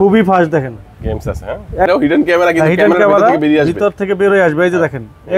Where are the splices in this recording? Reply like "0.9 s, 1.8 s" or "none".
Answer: 1.9 s